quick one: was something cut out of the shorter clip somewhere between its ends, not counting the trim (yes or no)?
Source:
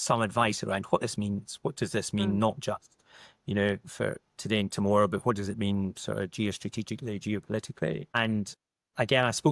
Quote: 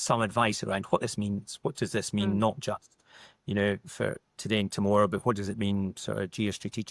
no